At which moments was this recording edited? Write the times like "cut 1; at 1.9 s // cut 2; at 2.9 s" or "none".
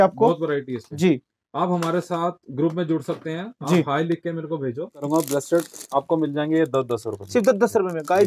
cut 1; at 5.1 s